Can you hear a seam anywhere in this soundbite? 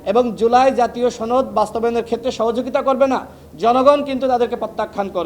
no; 0 cuts

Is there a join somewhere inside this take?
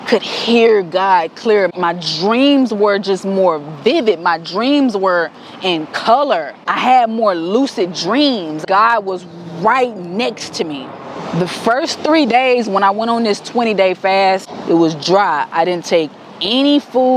yes; 5 cuts; at 1.7 s, 6.6 s, 8.6 s, 11.3 s, 14.5 s

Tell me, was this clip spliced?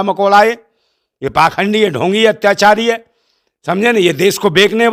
no; 0 cuts

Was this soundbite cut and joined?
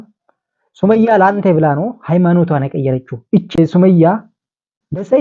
no; 0 cuts

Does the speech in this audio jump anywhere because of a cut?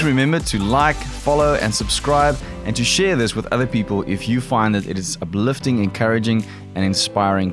no; 0 cuts

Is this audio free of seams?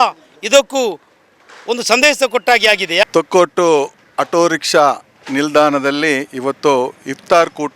no; 1 cut; at 3.1 s

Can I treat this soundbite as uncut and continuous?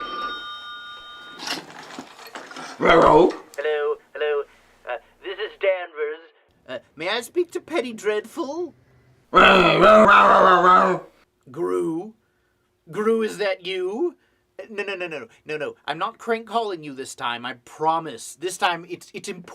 no; 1 cut; at 10.0 s

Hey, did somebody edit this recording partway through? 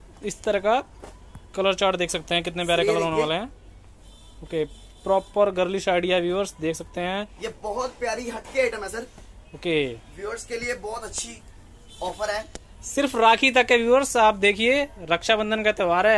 no; 0 cuts

